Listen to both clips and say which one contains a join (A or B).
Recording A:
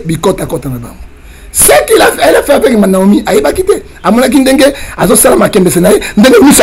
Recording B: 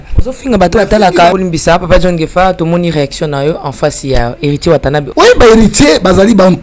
B